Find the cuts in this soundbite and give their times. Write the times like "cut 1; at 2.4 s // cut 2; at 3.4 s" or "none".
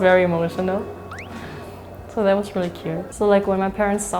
cut 1; at 3.1 s